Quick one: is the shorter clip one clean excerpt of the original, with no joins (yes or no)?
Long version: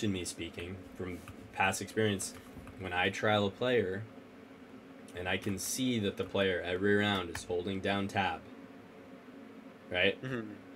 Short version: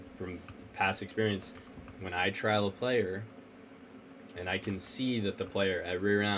yes